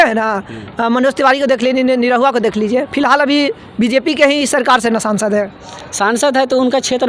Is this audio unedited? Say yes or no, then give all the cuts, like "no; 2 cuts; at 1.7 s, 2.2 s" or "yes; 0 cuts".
yes; 0 cuts